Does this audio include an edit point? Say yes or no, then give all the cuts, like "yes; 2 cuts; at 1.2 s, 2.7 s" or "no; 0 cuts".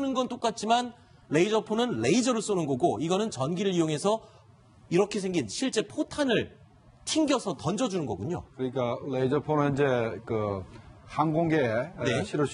yes; 1 cut; at 11.4 s